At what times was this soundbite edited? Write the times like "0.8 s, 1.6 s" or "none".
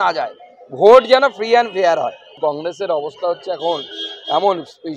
2.3 s